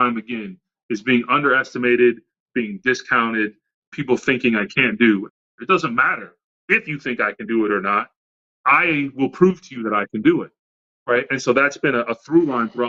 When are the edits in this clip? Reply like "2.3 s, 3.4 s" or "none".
5.3 s